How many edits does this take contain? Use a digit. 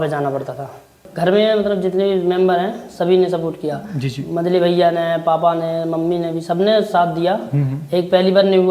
1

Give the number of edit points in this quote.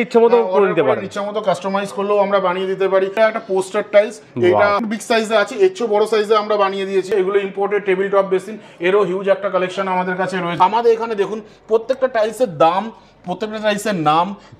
4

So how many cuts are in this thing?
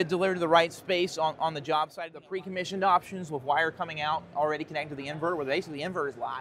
1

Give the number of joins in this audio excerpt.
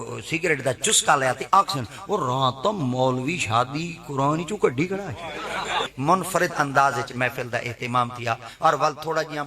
1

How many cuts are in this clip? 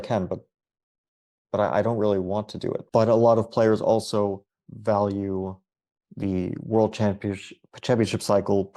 1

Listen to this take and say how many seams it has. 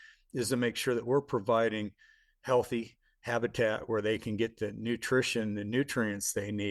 0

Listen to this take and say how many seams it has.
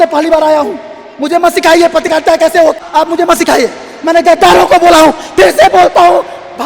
1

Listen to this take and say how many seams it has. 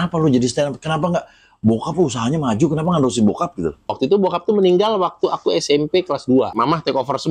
2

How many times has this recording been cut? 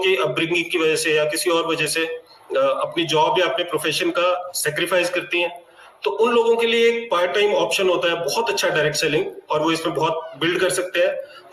0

